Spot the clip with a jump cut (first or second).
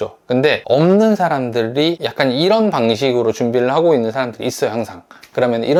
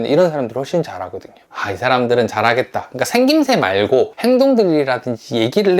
second